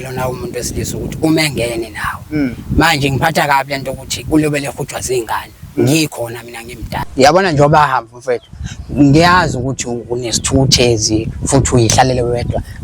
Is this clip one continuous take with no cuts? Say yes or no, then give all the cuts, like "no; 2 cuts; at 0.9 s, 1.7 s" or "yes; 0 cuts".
no; 1 cut; at 6.9 s